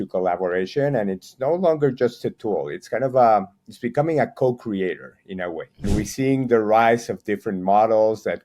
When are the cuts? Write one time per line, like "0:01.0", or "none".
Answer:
0:05.8